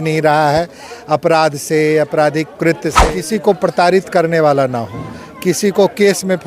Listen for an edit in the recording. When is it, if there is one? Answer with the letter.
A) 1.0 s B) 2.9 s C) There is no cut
B